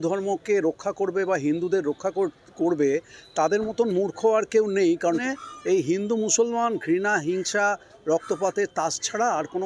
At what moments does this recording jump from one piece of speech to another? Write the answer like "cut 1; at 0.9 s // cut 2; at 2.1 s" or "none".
cut 1; at 5.2 s